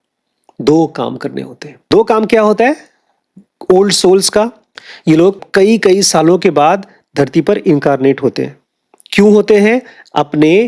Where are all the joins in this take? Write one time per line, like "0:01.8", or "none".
0:01.9
0:05.4